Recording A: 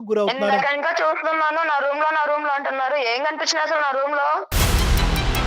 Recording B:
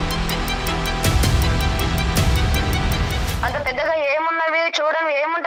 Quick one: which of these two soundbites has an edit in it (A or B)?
A